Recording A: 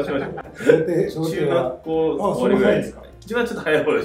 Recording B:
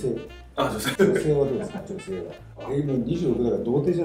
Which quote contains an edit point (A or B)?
B